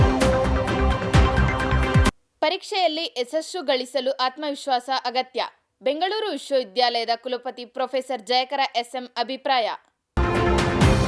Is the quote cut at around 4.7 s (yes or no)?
no